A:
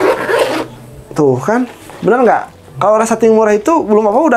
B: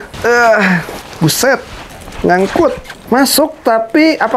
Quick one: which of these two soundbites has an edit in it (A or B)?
B